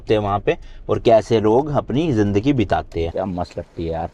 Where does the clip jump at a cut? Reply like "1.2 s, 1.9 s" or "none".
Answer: 3.1 s